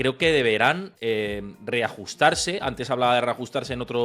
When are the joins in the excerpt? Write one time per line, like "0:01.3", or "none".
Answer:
0:00.9